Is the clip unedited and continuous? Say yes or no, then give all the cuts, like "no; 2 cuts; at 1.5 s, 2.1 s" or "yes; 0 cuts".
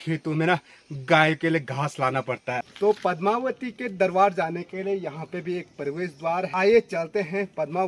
no; 2 cuts; at 2.7 s, 6.5 s